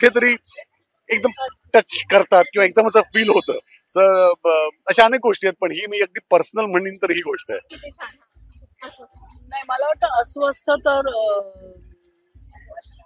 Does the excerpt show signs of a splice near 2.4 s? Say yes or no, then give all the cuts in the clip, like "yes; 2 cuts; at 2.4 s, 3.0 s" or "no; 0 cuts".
no; 0 cuts